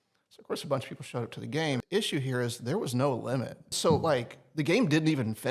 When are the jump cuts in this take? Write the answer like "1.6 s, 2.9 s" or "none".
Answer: 1.8 s, 3.8 s